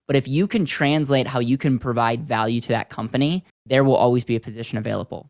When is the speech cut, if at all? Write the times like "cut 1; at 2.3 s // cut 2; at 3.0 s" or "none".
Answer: cut 1; at 3.5 s